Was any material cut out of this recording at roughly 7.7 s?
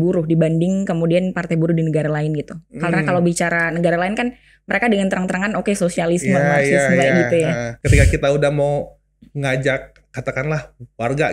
yes; 1 cut; at 7.7 s

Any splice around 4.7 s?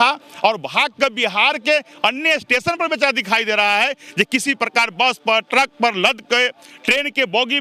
no; 0 cuts

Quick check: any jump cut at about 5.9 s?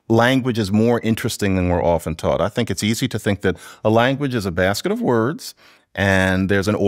no; 0 cuts

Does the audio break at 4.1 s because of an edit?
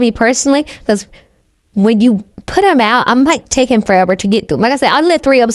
no; 0 cuts

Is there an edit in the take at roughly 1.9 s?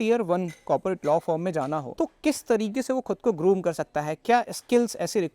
yes; 1 cut; at 1.9 s

